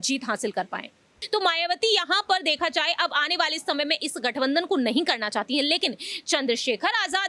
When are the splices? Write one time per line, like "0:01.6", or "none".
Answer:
0:01.1